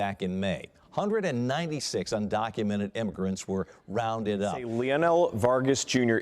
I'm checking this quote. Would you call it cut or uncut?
cut